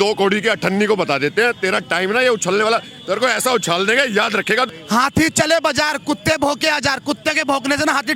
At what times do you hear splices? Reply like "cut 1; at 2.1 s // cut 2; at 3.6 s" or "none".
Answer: cut 1; at 4.7 s

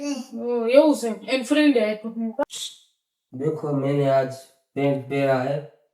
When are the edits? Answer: cut 1; at 2.5 s

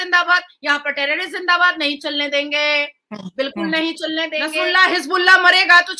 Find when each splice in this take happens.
cut 1; at 4.5 s

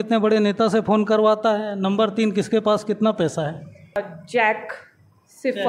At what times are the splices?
cut 1; at 4.0 s

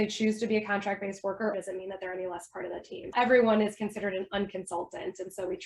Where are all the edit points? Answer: cut 1; at 1.5 s // cut 2; at 3.1 s

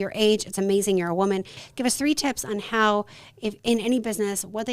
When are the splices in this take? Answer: cut 1; at 1.6 s

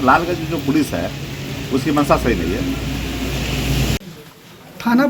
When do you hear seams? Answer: none

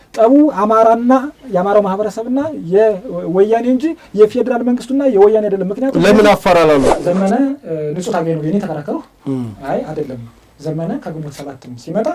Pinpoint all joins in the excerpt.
cut 1; at 6.9 s

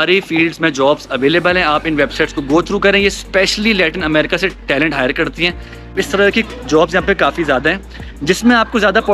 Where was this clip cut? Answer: cut 1; at 5.9 s

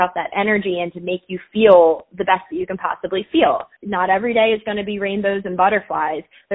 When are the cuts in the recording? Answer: cut 1; at 3.8 s

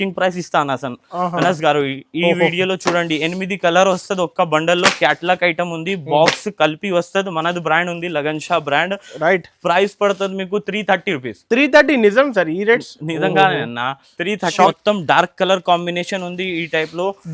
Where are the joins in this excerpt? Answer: cut 1; at 14.7 s

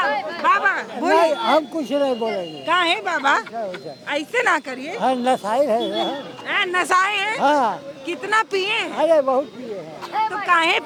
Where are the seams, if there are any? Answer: none

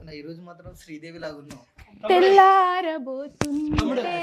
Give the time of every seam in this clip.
none

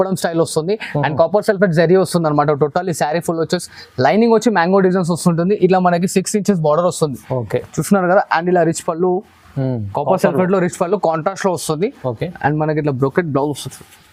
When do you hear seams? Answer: none

